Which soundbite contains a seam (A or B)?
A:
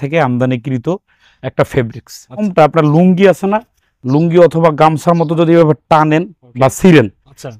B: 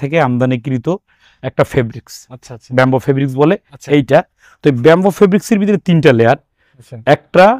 A